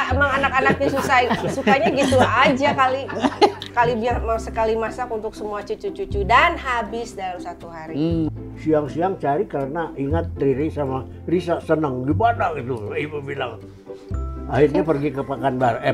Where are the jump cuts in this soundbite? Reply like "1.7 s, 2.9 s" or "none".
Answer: 3.7 s, 8.3 s